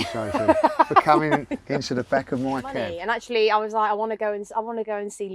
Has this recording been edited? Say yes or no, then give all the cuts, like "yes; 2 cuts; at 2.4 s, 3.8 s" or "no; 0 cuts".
yes; 1 cut; at 2.9 s